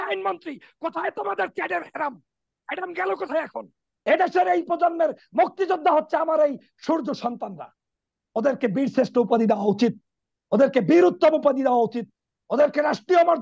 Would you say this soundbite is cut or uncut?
cut